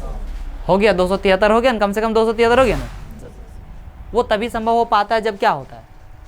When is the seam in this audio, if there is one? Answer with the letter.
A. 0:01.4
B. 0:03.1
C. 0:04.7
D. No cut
B